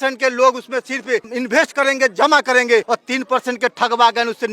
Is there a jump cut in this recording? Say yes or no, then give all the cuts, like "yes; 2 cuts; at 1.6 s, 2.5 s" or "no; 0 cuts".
yes; 2 cuts; at 1.3 s, 2.9 s